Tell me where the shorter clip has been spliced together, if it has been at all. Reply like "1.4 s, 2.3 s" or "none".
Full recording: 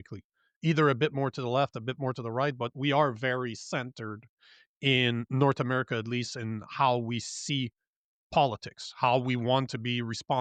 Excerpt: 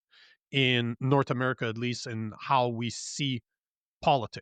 none